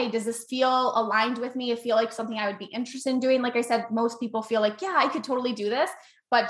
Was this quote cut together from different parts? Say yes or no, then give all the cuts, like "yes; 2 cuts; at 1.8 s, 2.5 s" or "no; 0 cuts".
no; 0 cuts